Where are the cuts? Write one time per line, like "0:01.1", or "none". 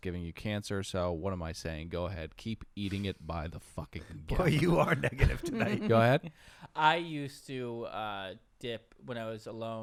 none